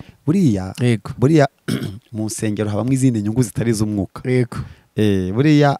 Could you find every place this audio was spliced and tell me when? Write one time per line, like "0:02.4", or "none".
none

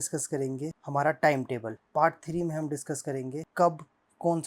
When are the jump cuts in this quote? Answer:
0:03.4

